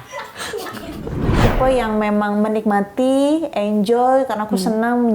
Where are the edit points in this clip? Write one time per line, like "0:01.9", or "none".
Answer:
0:01.4

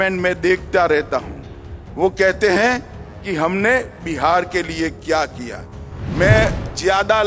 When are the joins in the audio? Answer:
none

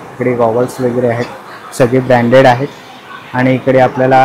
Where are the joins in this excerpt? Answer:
none

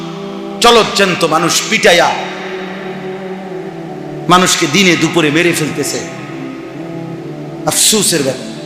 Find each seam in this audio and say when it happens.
0:02.2
0:04.2

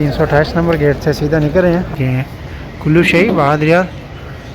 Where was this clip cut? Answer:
0:01.9

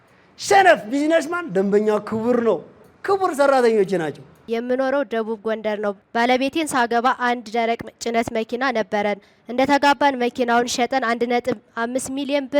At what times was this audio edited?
0:04.5
0:06.0

